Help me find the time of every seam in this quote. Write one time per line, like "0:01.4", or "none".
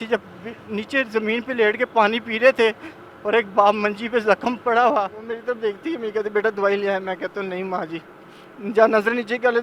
0:05.3